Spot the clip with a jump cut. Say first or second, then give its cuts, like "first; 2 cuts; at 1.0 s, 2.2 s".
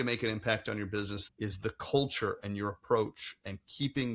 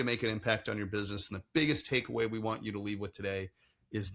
first; 1 cut; at 1.2 s